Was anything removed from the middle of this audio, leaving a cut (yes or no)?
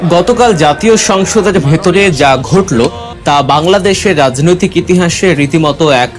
yes